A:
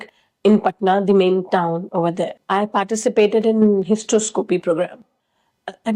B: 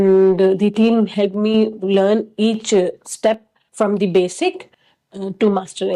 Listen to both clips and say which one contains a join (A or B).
A